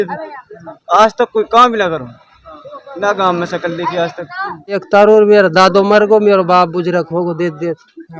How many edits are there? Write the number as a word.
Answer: one